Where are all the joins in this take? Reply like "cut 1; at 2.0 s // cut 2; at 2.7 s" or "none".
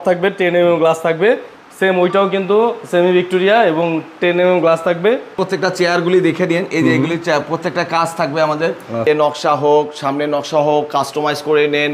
cut 1; at 5.4 s // cut 2; at 9.0 s

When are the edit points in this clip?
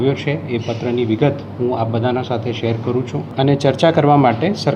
cut 1; at 3.2 s

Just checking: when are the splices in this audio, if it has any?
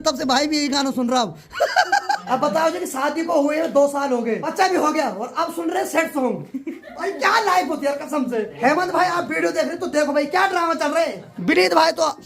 cut 1; at 2.2 s // cut 2; at 4.5 s // cut 3; at 8.5 s // cut 4; at 11.3 s

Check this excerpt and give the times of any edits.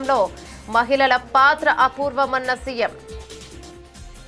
cut 1; at 3.0 s

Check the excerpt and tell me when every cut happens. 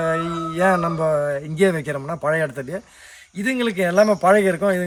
none

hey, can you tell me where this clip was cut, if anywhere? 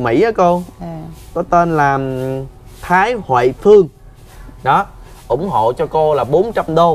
none

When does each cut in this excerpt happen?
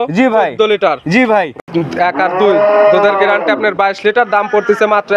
cut 1; at 1.6 s

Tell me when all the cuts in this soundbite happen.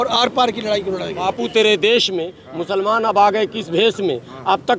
cut 1; at 1.3 s

